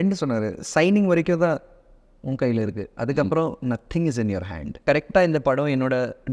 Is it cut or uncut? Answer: cut